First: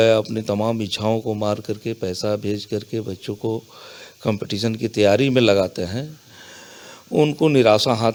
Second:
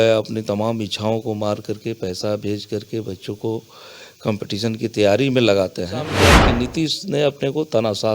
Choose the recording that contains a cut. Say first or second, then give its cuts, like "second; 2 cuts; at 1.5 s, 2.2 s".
second; 1 cut; at 6.3 s